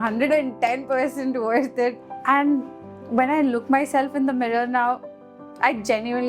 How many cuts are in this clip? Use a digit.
1